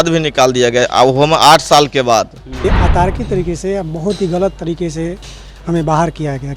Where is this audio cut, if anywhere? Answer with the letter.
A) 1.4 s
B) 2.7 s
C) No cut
B